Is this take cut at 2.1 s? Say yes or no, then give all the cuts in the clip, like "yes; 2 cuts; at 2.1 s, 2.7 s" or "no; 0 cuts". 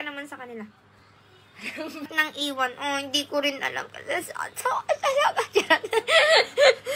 yes; 1 cut; at 2.1 s